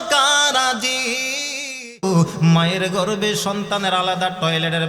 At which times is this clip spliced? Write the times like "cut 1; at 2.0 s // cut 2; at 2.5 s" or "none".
cut 1; at 2.0 s